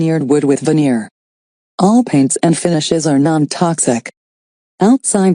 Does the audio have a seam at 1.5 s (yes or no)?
no